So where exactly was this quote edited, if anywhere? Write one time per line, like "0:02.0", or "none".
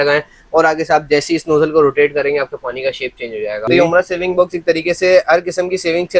0:03.6